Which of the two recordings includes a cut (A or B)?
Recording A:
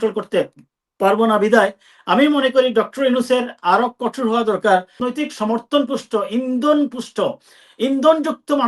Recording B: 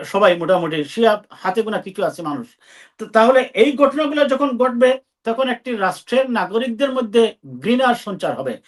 A